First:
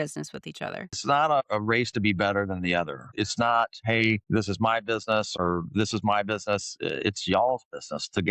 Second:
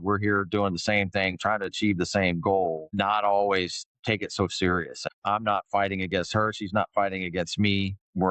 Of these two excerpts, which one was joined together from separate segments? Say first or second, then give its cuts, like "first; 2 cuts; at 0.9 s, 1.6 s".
first; 1 cut; at 1.0 s